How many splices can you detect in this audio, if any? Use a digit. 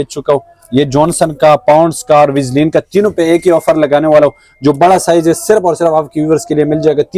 0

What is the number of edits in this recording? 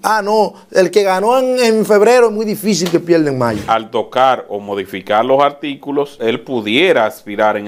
2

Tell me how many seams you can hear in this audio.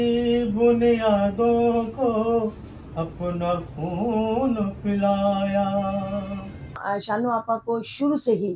1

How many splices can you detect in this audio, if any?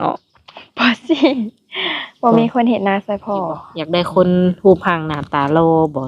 1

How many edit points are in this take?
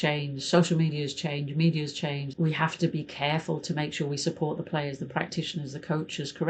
1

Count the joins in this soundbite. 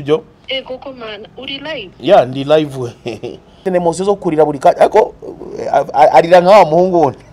1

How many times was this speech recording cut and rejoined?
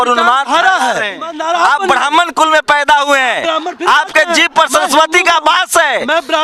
1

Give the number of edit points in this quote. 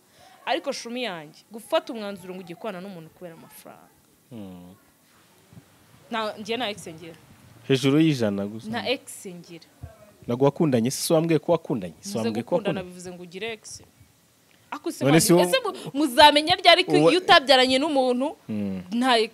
1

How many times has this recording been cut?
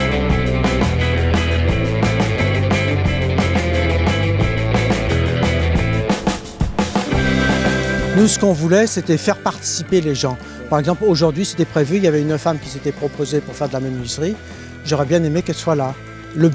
1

